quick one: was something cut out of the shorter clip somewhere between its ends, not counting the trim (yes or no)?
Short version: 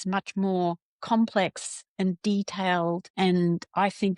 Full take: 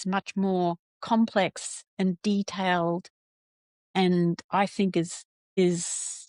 yes